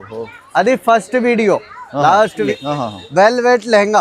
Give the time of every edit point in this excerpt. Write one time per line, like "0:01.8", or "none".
0:02.5